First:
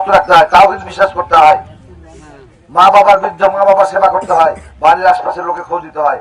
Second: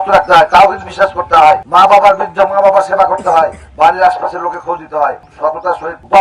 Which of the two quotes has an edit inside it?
second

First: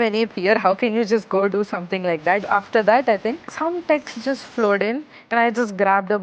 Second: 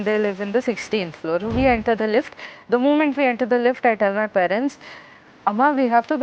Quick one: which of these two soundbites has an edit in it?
first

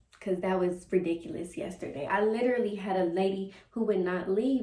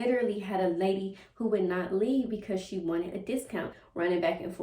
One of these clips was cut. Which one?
second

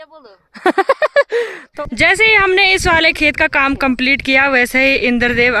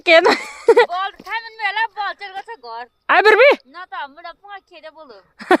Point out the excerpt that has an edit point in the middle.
first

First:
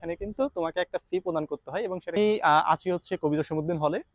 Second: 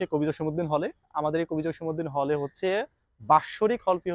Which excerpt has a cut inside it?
first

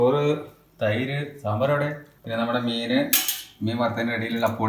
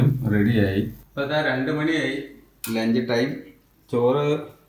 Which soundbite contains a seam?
first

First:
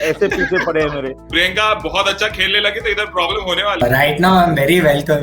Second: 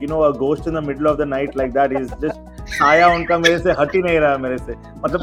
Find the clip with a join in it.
first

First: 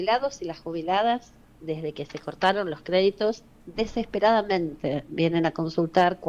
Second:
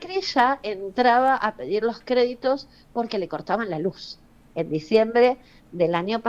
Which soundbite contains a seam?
second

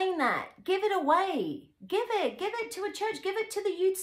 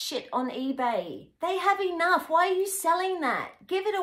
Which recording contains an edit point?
second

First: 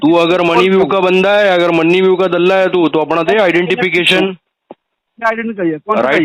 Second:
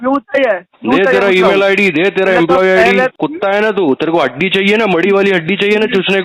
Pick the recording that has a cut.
second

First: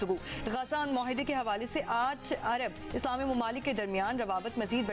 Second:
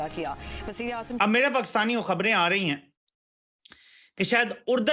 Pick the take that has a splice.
second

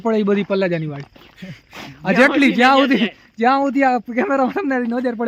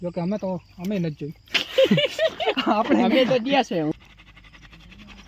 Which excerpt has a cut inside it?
second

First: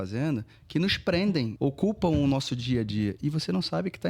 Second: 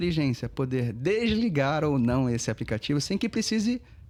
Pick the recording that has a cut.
first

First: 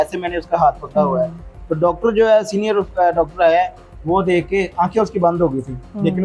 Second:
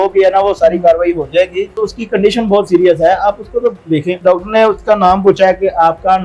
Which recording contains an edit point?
second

